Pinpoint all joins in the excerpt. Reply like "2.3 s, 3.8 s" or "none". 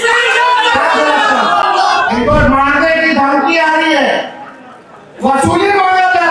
2.1 s

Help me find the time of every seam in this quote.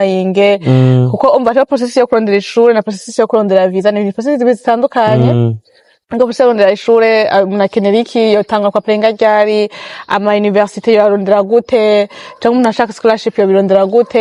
none

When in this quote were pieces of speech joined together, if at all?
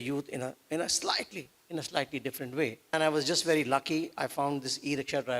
2.9 s

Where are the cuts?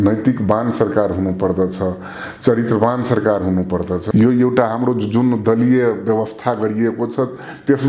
4.0 s

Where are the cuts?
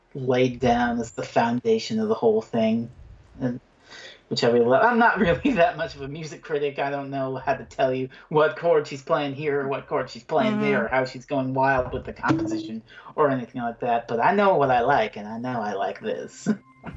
none

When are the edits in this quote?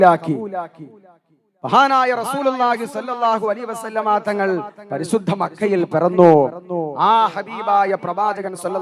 none

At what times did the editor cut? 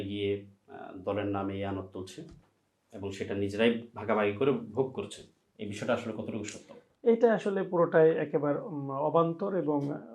none

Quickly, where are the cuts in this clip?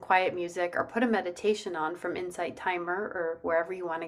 none

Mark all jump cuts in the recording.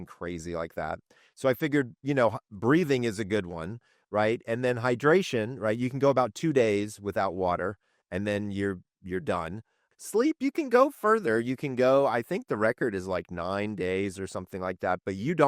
none

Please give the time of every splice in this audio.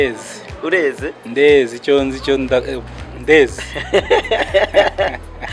none

